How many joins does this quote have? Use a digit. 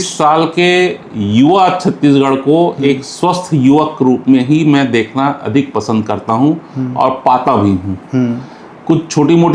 0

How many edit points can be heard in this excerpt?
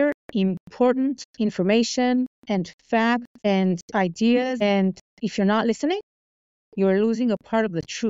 3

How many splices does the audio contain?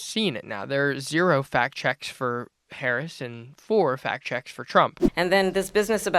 1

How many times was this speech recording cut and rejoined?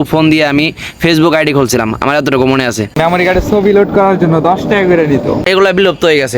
2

